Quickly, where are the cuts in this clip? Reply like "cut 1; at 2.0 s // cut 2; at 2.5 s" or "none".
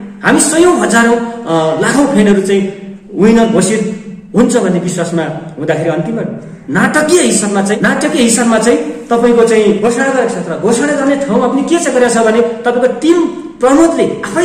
cut 1; at 7.8 s // cut 2; at 9.8 s